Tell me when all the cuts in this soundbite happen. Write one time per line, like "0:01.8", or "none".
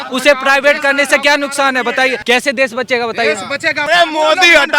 0:02.2
0:03.9